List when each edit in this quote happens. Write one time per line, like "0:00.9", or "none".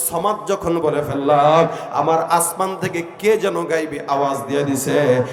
none